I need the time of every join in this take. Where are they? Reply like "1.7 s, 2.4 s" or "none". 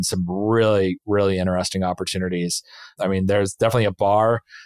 2.9 s